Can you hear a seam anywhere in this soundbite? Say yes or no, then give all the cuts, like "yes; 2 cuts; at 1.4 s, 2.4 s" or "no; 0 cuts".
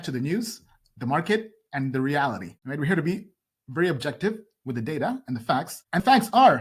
yes; 2 cuts; at 2.5 s, 5.8 s